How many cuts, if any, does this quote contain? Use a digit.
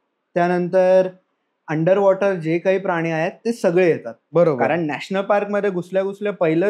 1